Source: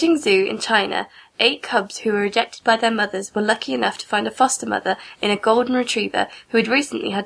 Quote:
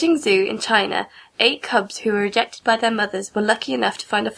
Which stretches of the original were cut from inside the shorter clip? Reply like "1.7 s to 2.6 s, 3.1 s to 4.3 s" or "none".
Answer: none